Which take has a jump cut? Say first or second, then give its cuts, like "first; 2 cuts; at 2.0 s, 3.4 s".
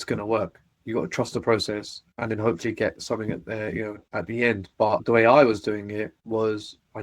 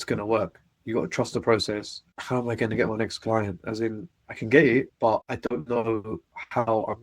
second; 1 cut; at 2.2 s